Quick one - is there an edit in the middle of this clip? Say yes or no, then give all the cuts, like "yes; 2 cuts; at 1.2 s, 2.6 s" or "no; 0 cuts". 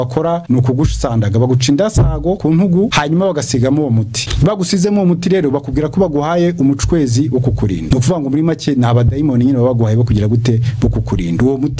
no; 0 cuts